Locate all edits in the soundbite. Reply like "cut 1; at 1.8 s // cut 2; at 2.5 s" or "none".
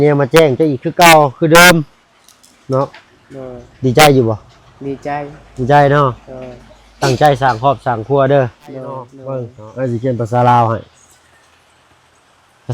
cut 1; at 9.2 s